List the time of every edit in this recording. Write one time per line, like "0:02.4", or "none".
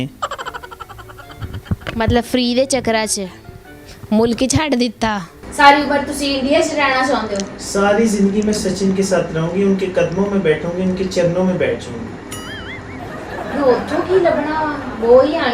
0:05.3